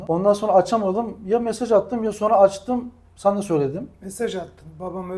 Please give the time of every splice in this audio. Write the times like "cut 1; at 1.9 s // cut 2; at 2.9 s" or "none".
none